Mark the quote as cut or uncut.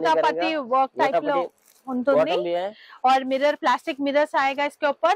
uncut